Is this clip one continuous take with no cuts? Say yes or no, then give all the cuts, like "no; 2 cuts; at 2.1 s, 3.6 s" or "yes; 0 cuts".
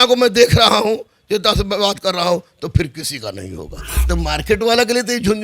no; 1 cut; at 3.9 s